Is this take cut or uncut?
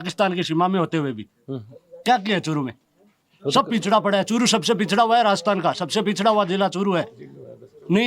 uncut